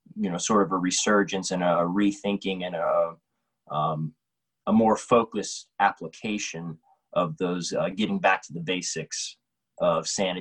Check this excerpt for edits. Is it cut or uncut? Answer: uncut